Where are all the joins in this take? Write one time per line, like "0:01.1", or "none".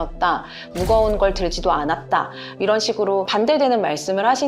0:03.3